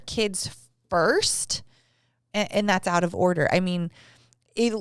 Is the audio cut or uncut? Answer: uncut